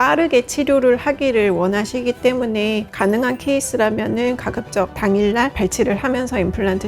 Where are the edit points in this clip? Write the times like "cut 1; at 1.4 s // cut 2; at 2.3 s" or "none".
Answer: cut 1; at 2.9 s